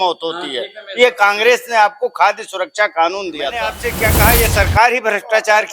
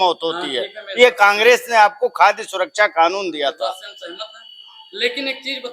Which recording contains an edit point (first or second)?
first